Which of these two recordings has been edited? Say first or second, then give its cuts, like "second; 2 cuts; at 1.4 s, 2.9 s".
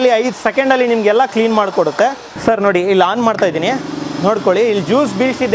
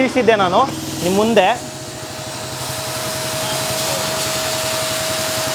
first; 1 cut; at 2.3 s